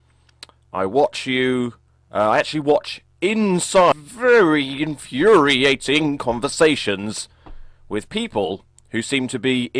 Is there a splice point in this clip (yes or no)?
no